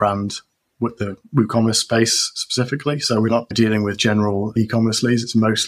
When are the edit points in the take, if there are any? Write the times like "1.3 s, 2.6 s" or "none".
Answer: 3.5 s, 4.5 s